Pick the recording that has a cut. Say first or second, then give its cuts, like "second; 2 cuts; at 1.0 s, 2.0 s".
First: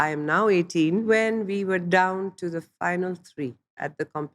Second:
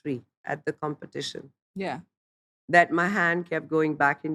first; 1 cut; at 1.0 s